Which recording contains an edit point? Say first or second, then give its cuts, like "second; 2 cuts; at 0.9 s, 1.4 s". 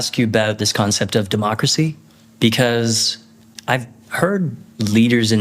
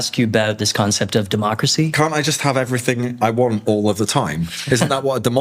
second; 1 cut; at 1.9 s